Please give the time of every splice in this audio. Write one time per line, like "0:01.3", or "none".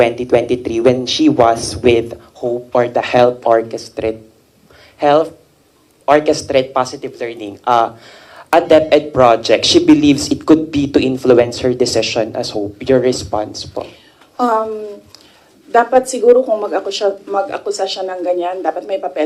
none

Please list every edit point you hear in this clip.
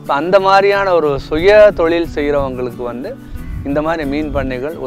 none

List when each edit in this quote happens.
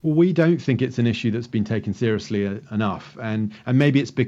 none

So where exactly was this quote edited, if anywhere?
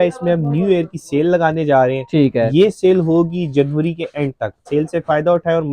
0:04.6

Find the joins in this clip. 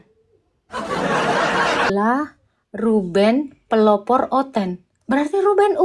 0:01.9

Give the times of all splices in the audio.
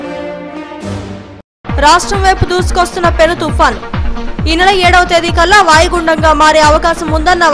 none

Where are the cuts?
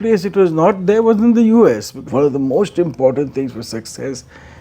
0:01.9

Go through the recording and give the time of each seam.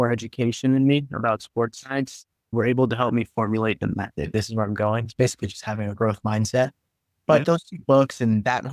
0:02.5
0:04.3
0:07.4

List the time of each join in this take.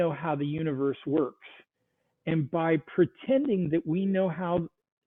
none

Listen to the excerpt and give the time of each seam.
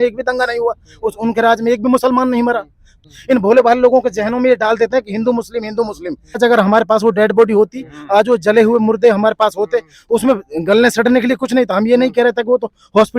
0:03.1
0:06.4

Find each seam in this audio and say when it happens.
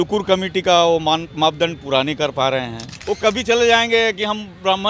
0:02.9

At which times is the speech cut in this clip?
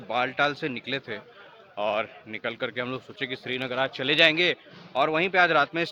none

